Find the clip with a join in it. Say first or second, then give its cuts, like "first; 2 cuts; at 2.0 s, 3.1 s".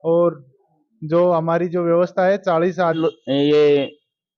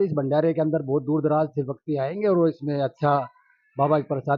first; 1 cut; at 3.0 s